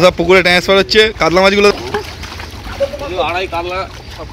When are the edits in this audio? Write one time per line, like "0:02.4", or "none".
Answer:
0:01.7